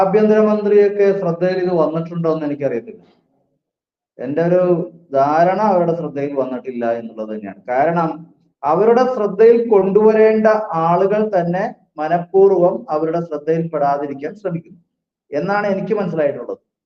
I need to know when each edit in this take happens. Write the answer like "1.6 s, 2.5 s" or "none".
none